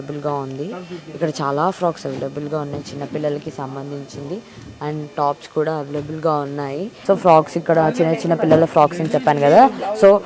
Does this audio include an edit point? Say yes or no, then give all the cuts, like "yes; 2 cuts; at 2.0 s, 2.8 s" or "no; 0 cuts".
no; 0 cuts